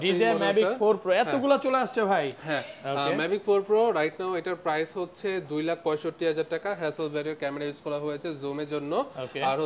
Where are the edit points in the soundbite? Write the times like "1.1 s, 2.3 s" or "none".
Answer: none